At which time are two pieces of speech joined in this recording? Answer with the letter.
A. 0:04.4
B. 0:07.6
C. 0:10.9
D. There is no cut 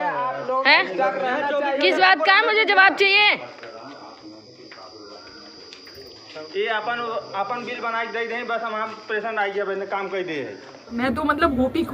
C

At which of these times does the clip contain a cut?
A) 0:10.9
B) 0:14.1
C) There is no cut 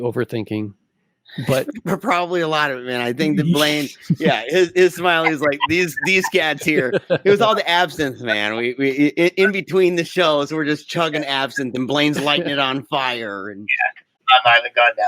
B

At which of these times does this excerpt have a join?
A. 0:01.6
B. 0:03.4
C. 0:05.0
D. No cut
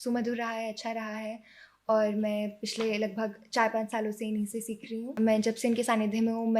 C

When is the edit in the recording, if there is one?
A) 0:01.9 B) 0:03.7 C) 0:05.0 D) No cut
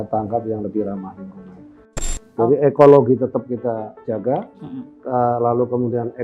A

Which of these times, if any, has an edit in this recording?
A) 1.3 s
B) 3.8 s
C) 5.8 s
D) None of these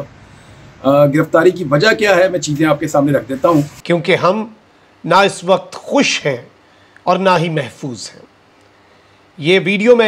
B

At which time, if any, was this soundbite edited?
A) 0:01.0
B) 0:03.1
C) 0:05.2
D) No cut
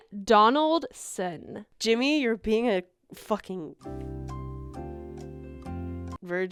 D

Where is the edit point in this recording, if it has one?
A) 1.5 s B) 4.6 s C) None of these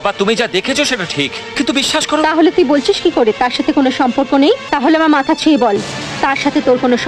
B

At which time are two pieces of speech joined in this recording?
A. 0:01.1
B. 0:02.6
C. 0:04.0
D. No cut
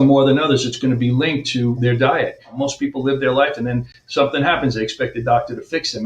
B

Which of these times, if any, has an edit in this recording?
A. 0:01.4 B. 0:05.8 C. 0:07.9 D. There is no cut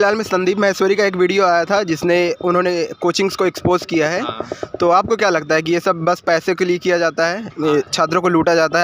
D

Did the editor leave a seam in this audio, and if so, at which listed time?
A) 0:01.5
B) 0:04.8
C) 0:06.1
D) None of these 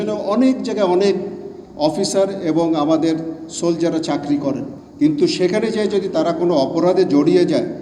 B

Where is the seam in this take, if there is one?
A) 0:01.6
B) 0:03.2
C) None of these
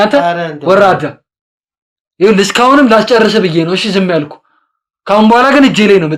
C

